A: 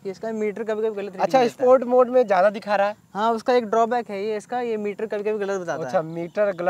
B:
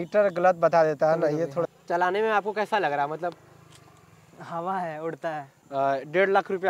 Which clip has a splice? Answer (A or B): B